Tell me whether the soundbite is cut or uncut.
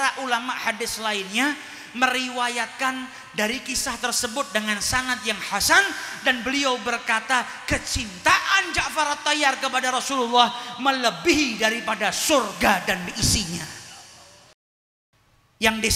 cut